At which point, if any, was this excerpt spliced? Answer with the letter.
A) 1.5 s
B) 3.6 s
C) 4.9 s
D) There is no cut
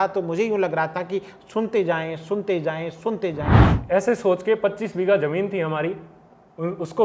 B